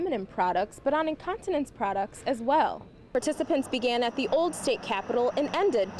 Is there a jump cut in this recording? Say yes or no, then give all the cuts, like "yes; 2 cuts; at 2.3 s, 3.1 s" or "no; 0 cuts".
yes; 1 cut; at 3.1 s